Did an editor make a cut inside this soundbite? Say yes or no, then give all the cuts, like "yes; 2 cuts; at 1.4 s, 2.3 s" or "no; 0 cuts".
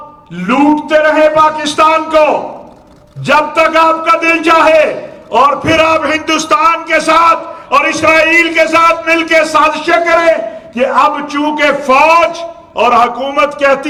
no; 0 cuts